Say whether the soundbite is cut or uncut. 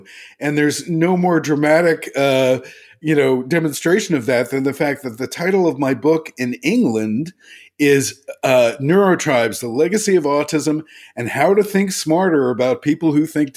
uncut